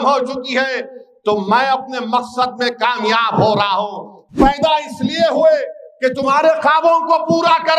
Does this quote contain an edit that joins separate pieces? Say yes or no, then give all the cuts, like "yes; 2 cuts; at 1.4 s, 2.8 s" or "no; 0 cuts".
yes; 1 cut; at 4.3 s